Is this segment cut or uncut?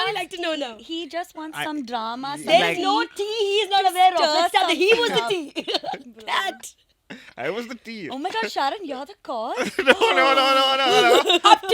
uncut